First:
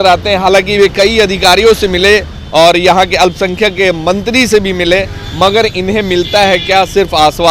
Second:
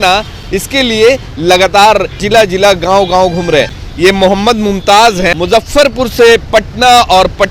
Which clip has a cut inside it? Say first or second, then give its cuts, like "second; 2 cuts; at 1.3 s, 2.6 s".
second; 3 cuts; at 2.2 s, 3.8 s, 5.4 s